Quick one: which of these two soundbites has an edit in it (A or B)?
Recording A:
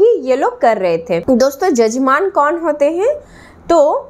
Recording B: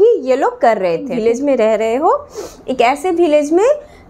B